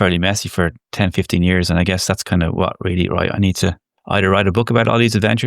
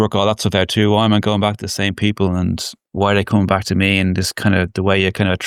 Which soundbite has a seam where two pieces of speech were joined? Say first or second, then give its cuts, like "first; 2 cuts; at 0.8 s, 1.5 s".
first; 1 cut; at 3.9 s